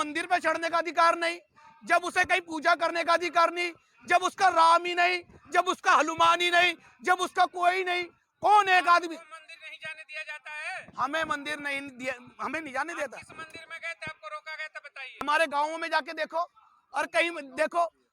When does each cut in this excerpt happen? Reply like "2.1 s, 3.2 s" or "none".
15.3 s